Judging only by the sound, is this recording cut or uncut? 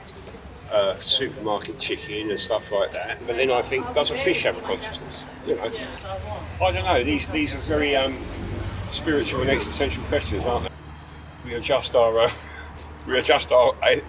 cut